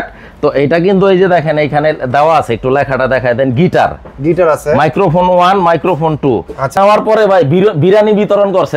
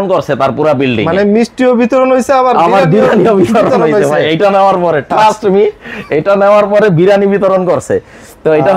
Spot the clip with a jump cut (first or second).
first